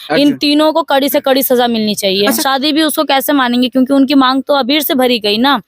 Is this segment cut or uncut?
cut